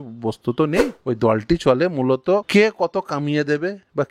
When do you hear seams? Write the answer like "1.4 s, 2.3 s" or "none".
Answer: 0.9 s, 2.5 s